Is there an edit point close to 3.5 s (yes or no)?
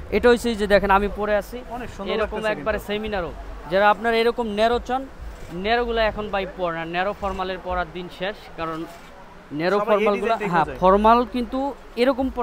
no